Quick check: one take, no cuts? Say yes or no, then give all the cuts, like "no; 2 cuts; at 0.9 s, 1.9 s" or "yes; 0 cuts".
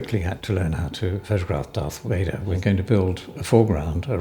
no; 1 cut; at 2.5 s